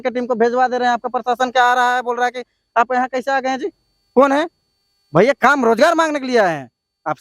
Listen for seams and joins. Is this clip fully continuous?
yes; 0 cuts

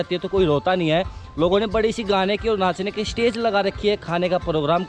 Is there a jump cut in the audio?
no; 0 cuts

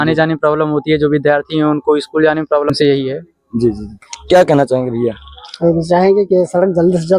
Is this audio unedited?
no; 1 cut; at 2.7 s

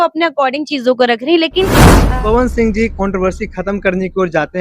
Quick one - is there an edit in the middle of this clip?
yes; 1 cut; at 2.0 s

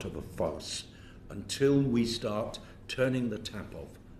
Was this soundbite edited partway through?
no; 0 cuts

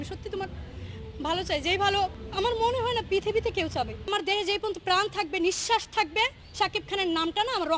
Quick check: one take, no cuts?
no; 2 cuts; at 2.2 s, 4.1 s

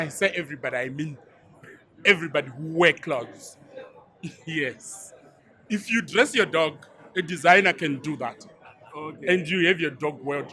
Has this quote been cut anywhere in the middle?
no; 0 cuts

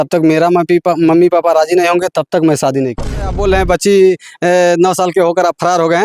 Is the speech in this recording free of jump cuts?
no; 1 cut; at 3.3 s

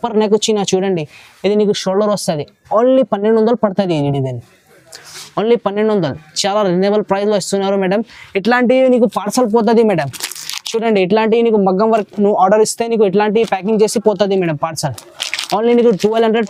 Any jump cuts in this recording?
no; 0 cuts

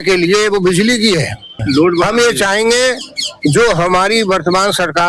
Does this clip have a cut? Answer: yes; 1 cut; at 1.6 s

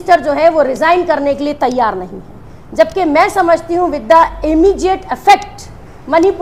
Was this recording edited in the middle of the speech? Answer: no; 0 cuts

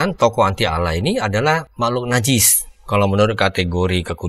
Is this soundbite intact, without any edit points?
no; 1 cut; at 1.7 s

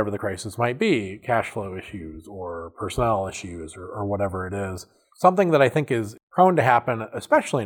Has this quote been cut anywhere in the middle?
no; 0 cuts

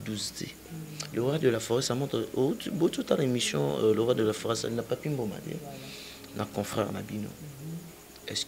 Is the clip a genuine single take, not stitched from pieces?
yes; 0 cuts

